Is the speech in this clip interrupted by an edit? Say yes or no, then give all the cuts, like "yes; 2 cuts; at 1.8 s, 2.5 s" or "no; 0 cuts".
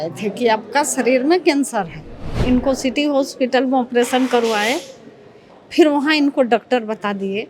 yes; 1 cut; at 2.3 s